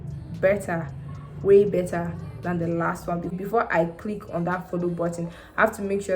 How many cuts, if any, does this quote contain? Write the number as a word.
one